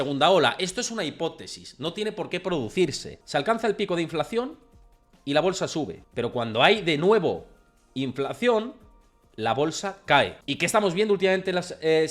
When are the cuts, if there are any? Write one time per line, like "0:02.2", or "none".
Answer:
0:03.1
0:06.0
0:10.4